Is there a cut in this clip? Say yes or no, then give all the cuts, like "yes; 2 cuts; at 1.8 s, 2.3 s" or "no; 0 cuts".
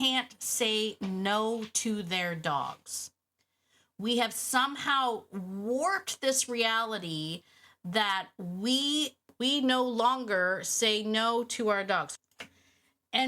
yes; 1 cut; at 9.3 s